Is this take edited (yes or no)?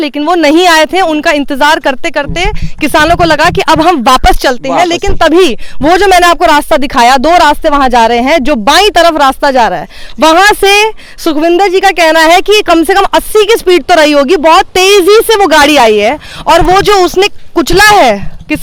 no